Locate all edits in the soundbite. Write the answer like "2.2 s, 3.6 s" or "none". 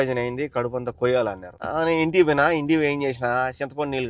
1.5 s